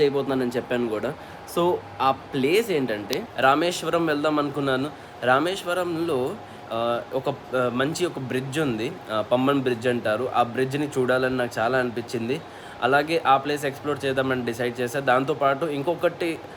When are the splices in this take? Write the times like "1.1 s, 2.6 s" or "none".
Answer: none